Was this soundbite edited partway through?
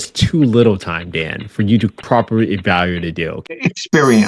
yes; 2 cuts; at 2.0 s, 3.4 s

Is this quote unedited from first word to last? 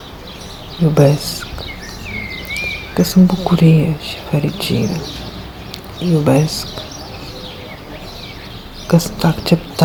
yes; 0 cuts

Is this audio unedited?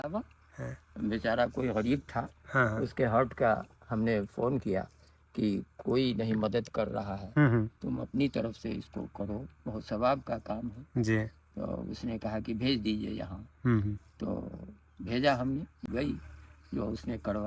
yes; 0 cuts

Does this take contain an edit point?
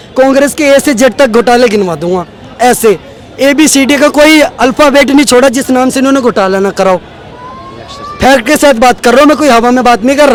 no; 0 cuts

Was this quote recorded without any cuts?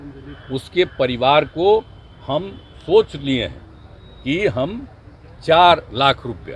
yes; 0 cuts

